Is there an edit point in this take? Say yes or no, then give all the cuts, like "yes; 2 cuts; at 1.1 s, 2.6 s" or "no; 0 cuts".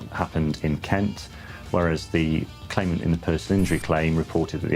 no; 0 cuts